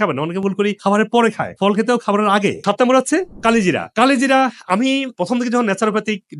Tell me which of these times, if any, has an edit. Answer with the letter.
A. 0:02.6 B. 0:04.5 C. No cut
A